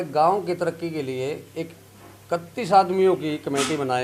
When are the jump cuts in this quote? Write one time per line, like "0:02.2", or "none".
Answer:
none